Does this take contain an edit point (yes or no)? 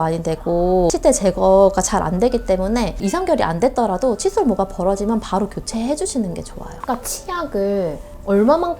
yes